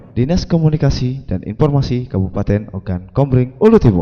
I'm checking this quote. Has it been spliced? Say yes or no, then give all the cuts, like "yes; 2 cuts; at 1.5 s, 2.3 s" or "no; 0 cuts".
no; 0 cuts